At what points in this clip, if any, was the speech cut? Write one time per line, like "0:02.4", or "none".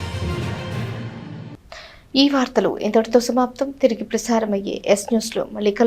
none